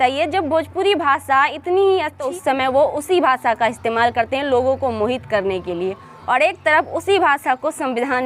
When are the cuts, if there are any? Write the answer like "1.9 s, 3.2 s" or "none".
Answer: 2.2 s